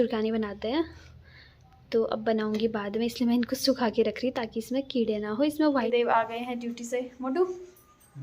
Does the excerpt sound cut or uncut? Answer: cut